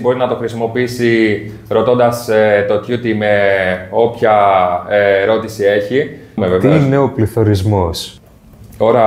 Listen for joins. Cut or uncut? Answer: uncut